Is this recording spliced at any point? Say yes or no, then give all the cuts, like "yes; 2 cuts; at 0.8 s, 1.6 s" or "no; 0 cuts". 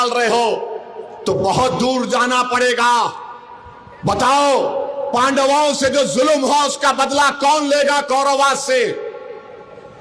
no; 0 cuts